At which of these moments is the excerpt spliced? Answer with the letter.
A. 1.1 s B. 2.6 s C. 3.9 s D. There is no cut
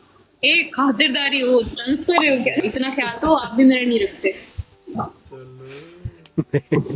B